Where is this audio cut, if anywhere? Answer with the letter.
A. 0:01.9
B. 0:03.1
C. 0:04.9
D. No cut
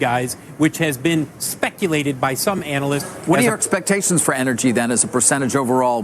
B